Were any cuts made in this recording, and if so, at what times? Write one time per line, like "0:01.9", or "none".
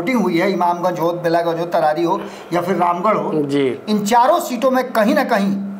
none